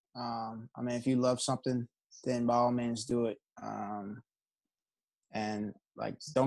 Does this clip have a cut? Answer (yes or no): no